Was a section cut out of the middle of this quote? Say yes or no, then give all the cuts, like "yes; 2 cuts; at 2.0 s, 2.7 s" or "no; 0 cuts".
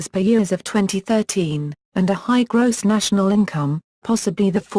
yes; 1 cut; at 1.2 s